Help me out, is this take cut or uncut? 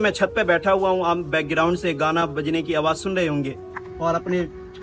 cut